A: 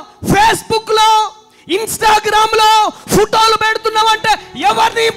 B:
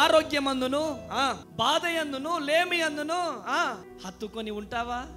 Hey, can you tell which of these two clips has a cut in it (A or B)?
B